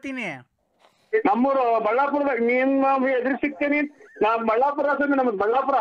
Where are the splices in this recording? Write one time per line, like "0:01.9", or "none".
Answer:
none